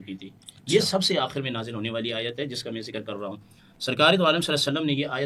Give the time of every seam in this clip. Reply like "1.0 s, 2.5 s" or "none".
none